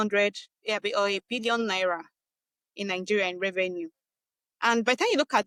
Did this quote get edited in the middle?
no; 0 cuts

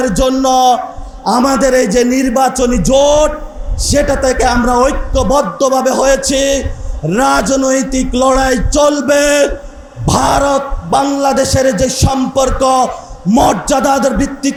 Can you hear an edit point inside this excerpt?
no; 0 cuts

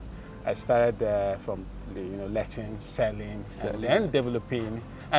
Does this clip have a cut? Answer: no; 0 cuts

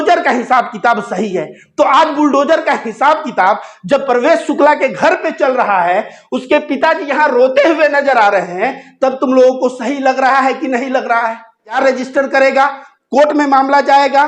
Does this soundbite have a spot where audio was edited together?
yes; 1 cut; at 11.8 s

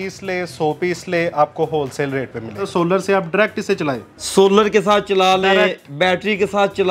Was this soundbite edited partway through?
yes; 1 cut; at 2.7 s

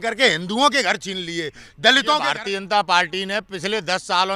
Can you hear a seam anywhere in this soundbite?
yes; 1 cut; at 2.2 s

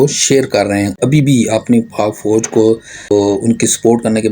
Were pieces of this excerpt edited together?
yes; 2 cuts; at 1.0 s, 3.1 s

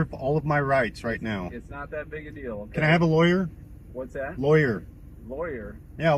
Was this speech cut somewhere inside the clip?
no; 0 cuts

